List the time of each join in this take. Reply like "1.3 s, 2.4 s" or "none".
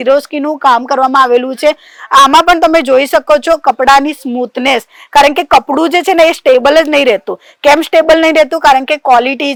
none